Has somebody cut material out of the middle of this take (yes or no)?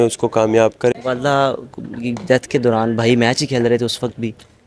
yes